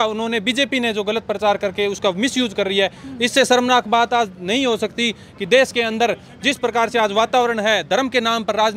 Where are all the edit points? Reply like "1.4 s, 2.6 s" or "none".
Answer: none